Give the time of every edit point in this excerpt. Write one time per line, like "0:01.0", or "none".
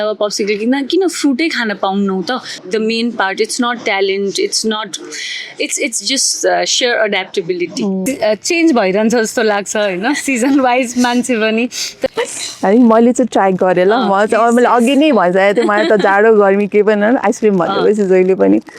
0:02.5
0:08.0
0:12.1